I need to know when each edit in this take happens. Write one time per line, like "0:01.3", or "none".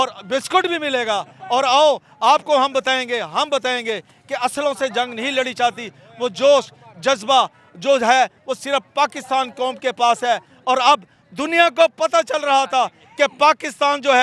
none